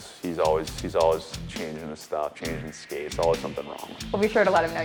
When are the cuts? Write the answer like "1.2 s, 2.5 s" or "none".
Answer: none